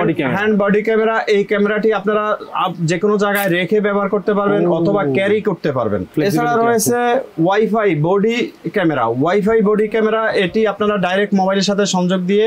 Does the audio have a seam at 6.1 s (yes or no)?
yes